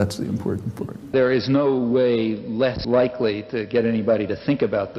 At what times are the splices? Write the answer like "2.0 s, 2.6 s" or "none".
1.1 s, 2.8 s

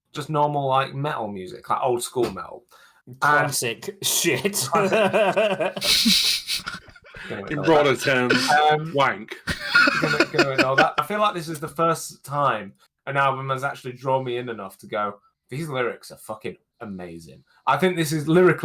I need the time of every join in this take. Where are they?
11.0 s

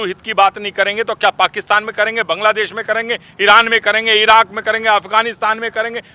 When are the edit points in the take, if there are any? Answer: none

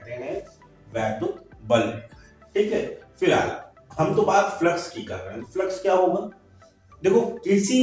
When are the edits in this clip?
none

